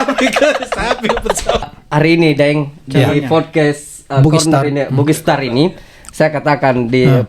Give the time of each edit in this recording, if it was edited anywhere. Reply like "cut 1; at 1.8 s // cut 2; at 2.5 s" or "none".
cut 1; at 1.8 s